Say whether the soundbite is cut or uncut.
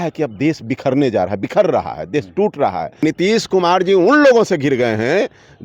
cut